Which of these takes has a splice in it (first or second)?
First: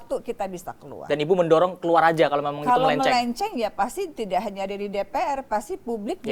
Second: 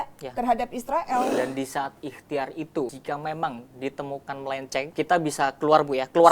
second